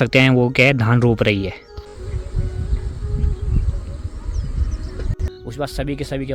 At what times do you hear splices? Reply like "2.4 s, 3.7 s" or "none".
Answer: 1.9 s, 5.3 s